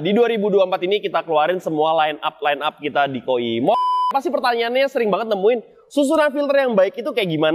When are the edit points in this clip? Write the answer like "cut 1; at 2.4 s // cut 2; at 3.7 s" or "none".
cut 1; at 3.8 s